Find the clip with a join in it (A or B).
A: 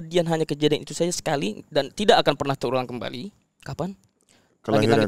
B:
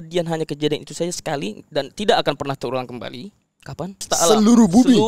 B